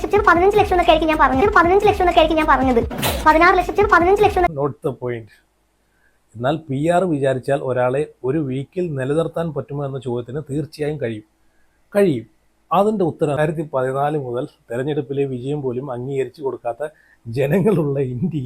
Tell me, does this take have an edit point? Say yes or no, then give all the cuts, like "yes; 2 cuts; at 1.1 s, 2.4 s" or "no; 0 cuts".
yes; 2 cuts; at 4.5 s, 13.4 s